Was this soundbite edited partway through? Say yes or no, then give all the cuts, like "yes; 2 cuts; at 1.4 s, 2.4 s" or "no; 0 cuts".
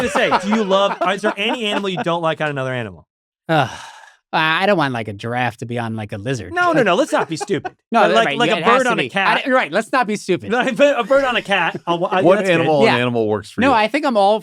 no; 0 cuts